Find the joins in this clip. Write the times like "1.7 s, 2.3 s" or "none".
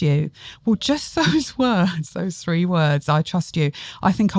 none